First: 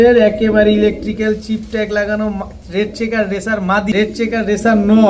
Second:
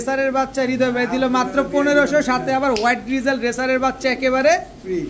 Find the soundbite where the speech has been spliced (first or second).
first